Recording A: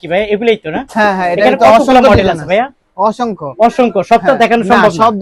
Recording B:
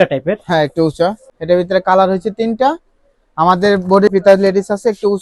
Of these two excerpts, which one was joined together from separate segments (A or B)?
B